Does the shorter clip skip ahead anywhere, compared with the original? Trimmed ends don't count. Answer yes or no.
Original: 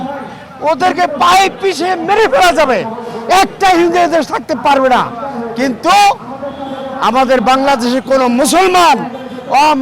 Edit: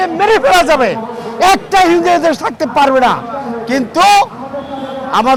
no